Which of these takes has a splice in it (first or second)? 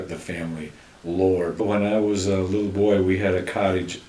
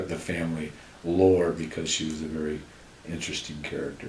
second